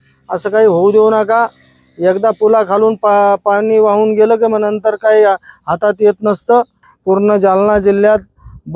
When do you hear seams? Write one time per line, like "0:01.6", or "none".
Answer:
0:06.9